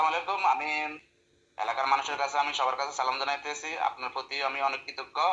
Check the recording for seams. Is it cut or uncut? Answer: cut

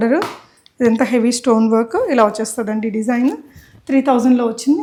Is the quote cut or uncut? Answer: uncut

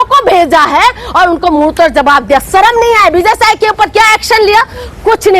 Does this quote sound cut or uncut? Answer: uncut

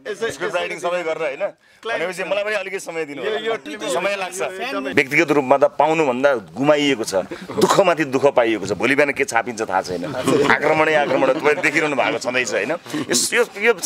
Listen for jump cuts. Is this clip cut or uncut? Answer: cut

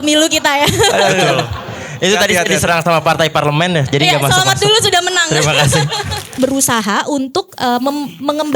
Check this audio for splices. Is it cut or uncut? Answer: cut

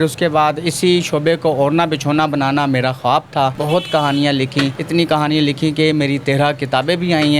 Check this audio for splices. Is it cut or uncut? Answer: cut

